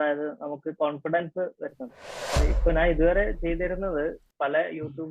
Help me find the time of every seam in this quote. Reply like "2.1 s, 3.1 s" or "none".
2.3 s

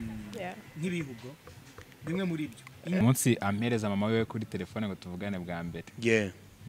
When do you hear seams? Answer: 3.0 s

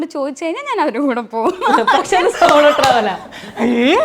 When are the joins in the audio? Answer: none

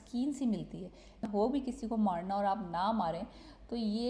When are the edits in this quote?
1.3 s

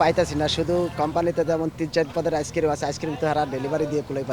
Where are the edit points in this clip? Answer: none

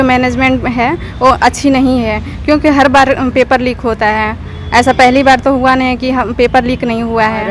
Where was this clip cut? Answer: none

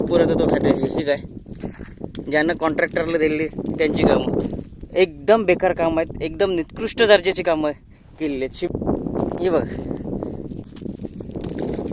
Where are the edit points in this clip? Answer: 8.4 s, 10.6 s

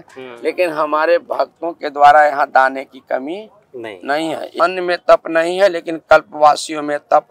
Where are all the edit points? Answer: 4.6 s

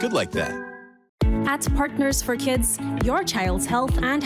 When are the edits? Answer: 0.9 s

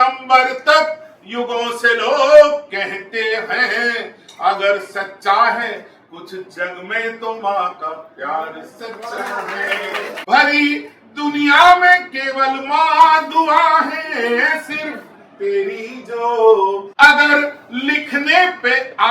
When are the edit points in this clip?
10.1 s, 16.9 s

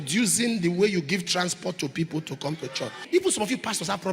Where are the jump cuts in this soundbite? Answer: 3.0 s

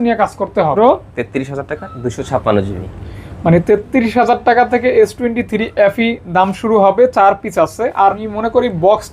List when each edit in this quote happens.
0.7 s, 8.2 s

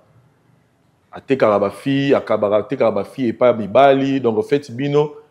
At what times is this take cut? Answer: none

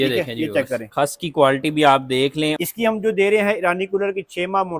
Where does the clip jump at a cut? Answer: 0.9 s, 2.6 s

